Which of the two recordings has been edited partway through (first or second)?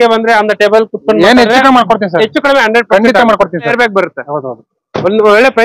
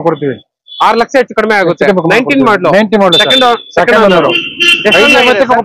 first